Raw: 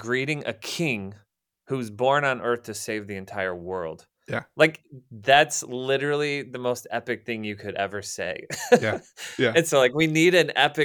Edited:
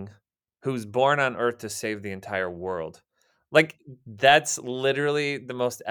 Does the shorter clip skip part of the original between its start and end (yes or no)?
no